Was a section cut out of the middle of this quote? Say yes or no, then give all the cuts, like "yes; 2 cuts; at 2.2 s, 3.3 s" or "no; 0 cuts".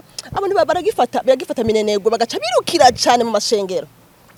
no; 0 cuts